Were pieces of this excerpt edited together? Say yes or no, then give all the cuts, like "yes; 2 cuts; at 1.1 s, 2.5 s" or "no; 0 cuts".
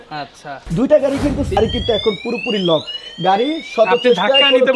yes; 1 cut; at 1.6 s